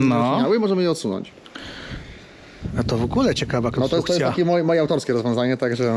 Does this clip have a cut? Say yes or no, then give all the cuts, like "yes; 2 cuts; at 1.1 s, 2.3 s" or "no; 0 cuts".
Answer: no; 0 cuts